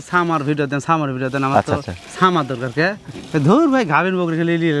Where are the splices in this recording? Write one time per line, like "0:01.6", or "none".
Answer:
none

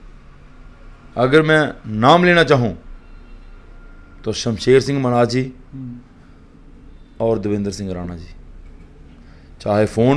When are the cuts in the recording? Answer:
none

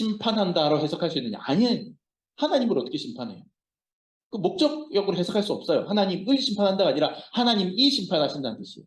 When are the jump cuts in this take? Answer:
none

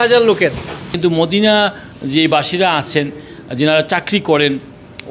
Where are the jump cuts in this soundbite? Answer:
0:01.0

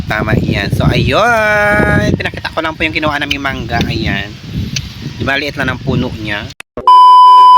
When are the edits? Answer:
0:06.5

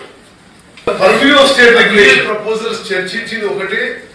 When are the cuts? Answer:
0:00.9
0:02.2

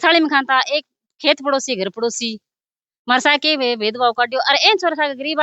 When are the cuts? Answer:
none

